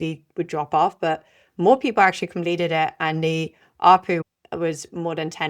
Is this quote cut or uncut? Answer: cut